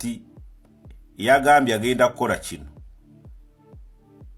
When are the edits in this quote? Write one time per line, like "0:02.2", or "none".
0:02.7